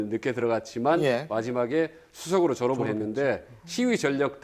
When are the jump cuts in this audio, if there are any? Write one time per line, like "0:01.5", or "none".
0:01.9